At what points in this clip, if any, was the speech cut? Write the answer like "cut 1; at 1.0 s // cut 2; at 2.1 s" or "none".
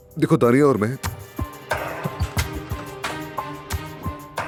none